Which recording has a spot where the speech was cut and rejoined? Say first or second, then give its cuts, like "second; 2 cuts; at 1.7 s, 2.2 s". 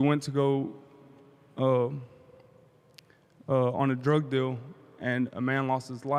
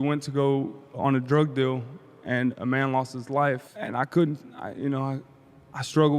second; 2 cuts; at 1.0 s, 3.7 s